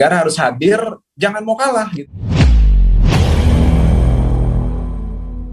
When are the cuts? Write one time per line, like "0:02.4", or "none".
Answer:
0:02.1